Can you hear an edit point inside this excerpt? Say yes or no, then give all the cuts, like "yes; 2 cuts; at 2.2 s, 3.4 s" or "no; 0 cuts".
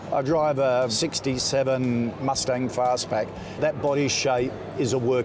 yes; 1 cut; at 0.9 s